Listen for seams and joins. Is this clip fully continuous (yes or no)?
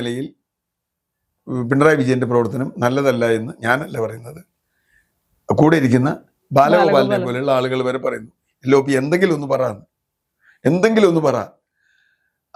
yes